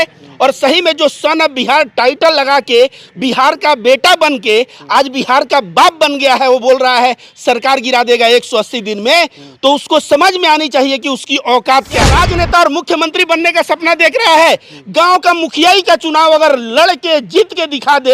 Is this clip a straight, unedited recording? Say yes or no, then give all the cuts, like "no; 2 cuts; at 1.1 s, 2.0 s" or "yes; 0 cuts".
no; 1 cut; at 12.1 s